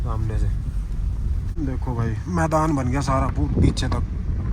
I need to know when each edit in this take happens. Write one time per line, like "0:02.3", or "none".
0:01.5